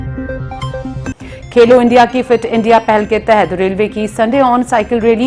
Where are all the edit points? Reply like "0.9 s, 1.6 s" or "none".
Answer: 1.0 s